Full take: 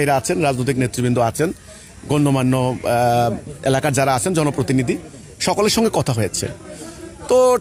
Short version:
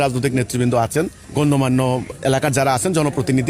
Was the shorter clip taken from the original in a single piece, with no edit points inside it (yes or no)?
no